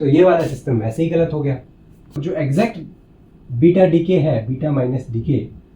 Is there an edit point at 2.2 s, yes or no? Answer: yes